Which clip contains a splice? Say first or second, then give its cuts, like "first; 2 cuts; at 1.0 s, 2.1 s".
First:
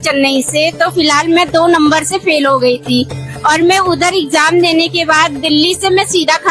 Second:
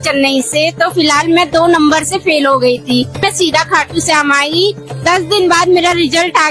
second; 2 cuts; at 3.2 s, 4.9 s